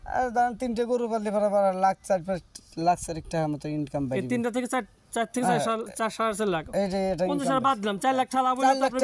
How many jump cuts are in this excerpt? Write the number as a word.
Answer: zero